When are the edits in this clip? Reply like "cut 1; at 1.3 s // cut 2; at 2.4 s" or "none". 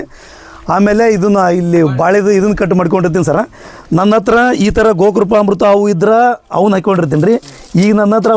none